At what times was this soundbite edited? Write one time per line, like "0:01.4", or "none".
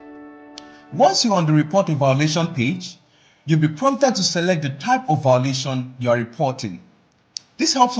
none